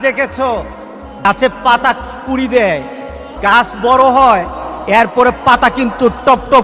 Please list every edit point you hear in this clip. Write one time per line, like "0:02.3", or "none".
0:01.2